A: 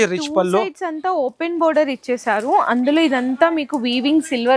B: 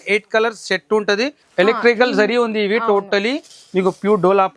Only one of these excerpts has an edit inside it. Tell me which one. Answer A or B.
B